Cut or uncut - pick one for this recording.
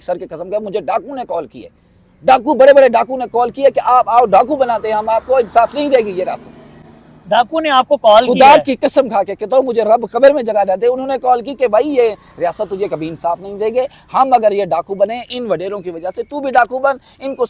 uncut